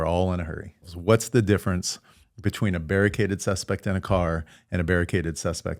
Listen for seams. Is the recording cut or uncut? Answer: cut